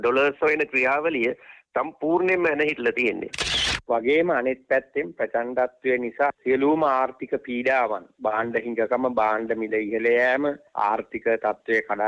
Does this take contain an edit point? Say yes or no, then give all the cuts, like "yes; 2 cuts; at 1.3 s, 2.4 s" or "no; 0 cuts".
yes; 2 cuts; at 3.7 s, 6.3 s